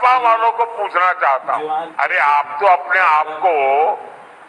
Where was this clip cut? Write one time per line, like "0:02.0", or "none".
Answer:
0:01.8